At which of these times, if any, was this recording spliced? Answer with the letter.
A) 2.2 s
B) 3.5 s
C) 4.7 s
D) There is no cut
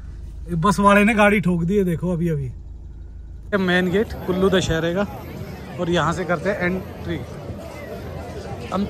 B